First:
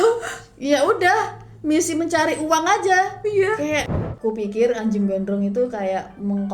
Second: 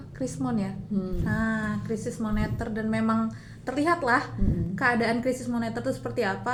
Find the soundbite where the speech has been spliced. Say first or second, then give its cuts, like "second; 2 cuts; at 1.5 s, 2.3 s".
first; 1 cut; at 4.0 s